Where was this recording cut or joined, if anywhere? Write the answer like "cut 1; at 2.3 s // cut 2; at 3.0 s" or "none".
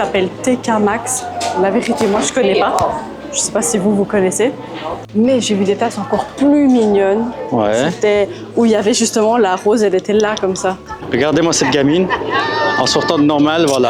cut 1; at 5.1 s // cut 2; at 10.9 s